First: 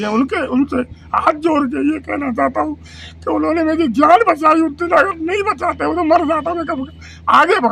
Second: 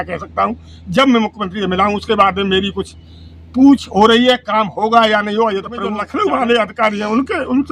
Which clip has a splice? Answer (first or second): second